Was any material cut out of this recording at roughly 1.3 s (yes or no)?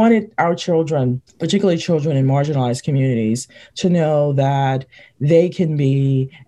yes